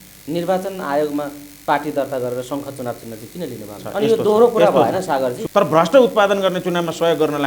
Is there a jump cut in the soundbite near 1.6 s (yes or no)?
no